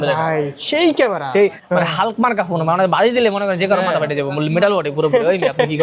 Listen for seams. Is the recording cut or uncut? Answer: cut